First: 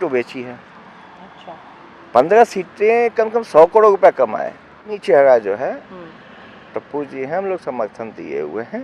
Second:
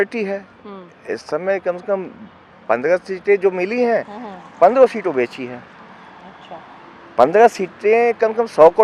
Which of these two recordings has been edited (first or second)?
first